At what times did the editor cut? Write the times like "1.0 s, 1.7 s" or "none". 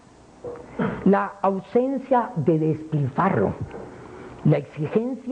none